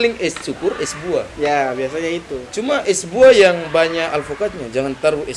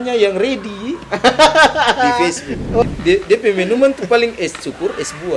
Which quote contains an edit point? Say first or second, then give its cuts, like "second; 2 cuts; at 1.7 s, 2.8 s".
second; 1 cut; at 2.8 s